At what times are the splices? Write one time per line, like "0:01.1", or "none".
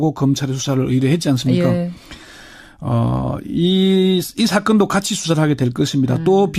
0:01.4